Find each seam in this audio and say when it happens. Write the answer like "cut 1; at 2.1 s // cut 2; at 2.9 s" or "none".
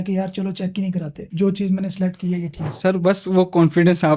none